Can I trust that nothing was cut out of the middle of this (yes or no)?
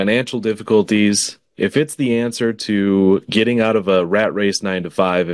yes